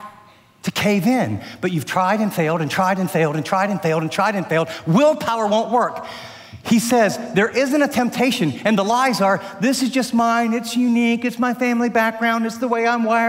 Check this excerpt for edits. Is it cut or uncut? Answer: uncut